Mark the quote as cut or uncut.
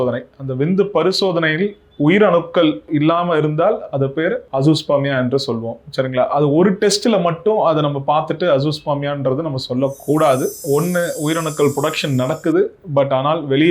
cut